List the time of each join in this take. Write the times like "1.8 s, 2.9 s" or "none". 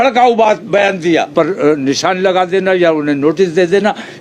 1.3 s